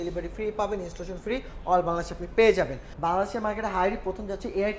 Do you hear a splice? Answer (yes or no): yes